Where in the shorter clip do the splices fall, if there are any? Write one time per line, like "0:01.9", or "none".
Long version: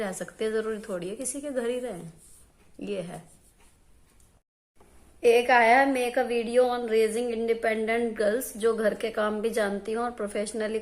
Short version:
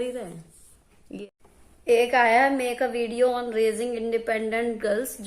0:01.3